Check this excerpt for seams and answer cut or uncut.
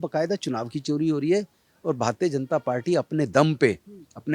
uncut